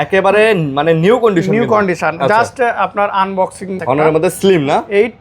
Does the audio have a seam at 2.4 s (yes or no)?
no